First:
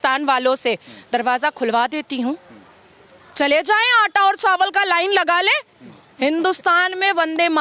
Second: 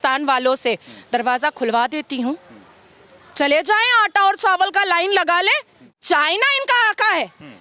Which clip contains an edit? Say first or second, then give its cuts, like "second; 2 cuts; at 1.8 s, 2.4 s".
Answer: second; 1 cut; at 6.0 s